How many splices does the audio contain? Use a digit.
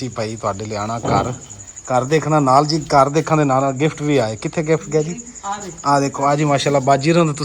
0